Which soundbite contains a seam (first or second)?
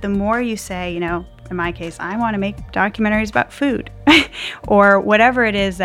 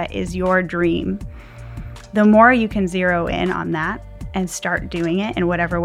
first